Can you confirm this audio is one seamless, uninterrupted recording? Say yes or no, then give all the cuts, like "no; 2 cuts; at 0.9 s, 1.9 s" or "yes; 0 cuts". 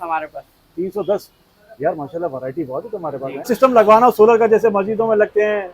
no; 1 cut; at 3.5 s